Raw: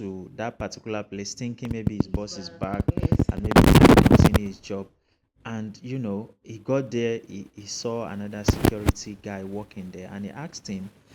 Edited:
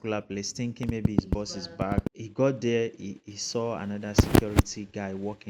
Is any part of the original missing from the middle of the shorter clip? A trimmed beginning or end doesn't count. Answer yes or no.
yes